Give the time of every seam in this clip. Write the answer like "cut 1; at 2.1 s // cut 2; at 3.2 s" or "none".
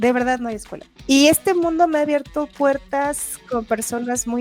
cut 1; at 1.0 s